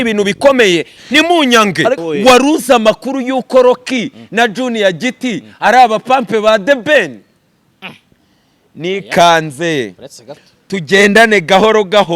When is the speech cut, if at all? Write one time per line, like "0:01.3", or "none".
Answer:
0:02.0